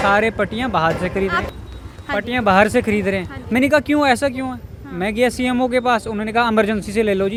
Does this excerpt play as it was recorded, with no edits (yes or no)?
yes